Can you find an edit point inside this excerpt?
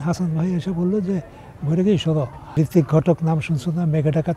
yes; 1 cut; at 2.4 s

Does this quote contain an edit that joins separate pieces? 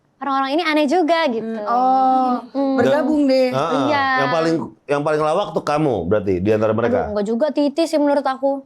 no; 0 cuts

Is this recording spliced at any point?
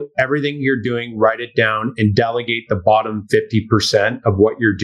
yes; 1 cut; at 3.2 s

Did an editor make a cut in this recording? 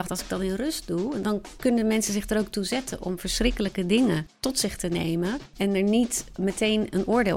yes; 4 cuts; at 1.2 s, 4.4 s, 5.5 s, 6.3 s

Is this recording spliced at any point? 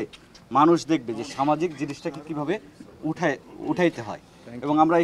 no; 0 cuts

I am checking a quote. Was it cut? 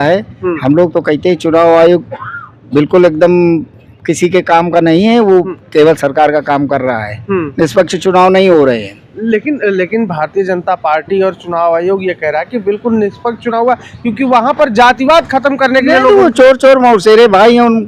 no; 0 cuts

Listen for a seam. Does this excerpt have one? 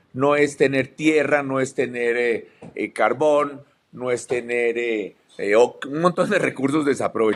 no; 0 cuts

